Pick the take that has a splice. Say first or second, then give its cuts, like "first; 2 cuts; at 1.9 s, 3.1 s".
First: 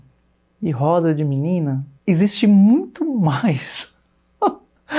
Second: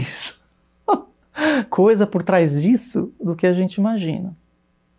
first; 1 cut; at 1.9 s